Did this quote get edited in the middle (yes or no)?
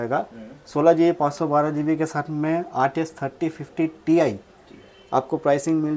no